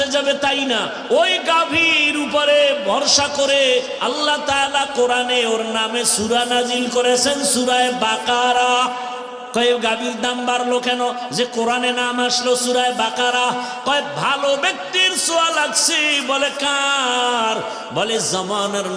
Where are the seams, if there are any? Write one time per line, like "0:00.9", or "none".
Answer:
0:09.4